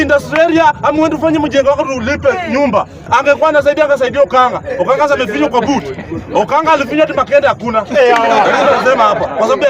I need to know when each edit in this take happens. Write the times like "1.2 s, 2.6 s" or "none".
3.0 s